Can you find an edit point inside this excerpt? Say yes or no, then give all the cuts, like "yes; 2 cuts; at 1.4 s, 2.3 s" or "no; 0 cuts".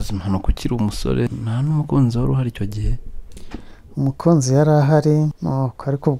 yes; 2 cuts; at 1.3 s, 5.4 s